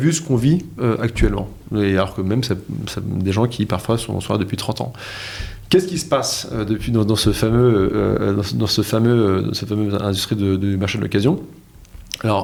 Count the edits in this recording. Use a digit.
0